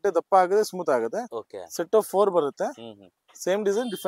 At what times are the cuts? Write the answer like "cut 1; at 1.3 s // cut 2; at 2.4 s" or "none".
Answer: none